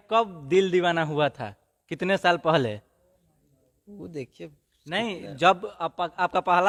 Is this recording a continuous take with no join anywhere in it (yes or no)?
yes